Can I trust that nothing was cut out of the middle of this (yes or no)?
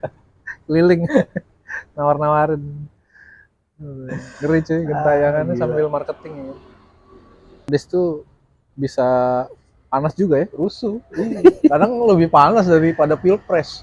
no